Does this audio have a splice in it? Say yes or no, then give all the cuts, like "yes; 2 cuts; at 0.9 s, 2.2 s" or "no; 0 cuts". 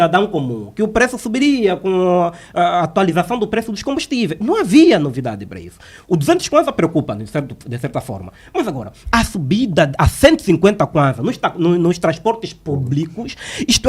no; 0 cuts